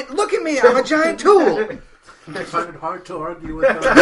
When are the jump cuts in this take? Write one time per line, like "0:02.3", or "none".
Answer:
none